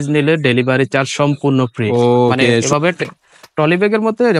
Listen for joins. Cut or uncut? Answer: cut